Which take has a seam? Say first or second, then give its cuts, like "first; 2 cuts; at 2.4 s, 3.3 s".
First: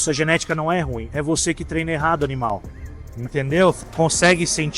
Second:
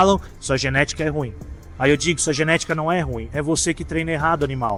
first; 1 cut; at 3.8 s